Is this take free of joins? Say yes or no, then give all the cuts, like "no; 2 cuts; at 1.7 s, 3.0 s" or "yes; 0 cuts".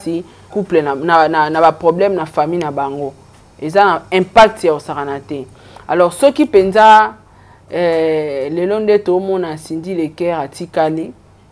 yes; 0 cuts